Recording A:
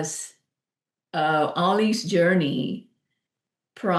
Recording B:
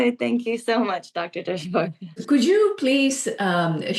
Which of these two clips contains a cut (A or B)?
B